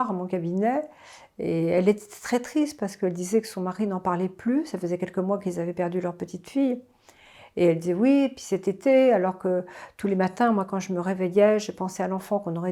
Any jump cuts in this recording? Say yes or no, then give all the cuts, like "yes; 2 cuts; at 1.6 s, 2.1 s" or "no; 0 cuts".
no; 0 cuts